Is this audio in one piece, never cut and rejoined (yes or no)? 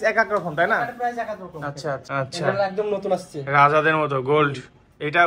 no